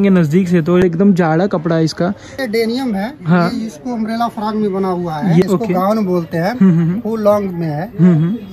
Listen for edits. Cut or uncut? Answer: cut